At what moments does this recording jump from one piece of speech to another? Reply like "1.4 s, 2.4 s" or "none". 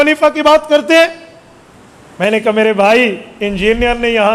none